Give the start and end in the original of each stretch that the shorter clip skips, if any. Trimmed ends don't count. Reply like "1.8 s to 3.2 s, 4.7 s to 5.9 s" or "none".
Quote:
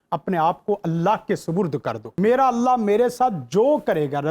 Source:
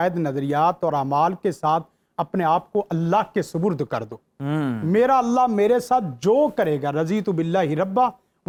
4.2 s to 4.8 s